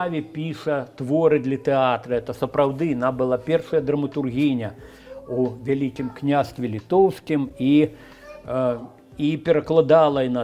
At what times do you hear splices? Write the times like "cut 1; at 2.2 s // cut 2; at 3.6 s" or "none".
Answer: none